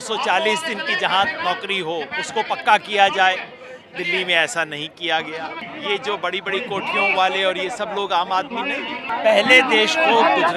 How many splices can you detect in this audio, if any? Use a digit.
2